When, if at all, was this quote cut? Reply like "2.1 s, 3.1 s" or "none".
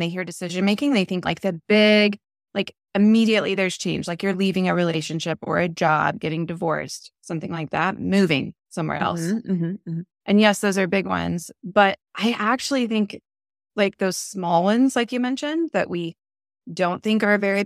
1.2 s

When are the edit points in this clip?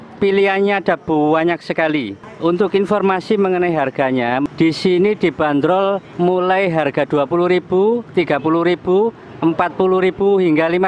2.2 s, 4.5 s

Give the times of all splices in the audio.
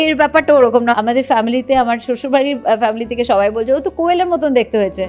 0.9 s

